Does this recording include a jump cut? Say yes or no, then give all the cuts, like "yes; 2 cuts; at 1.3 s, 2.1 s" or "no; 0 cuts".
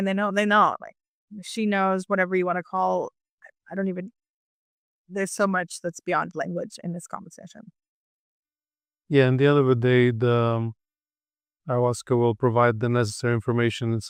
no; 0 cuts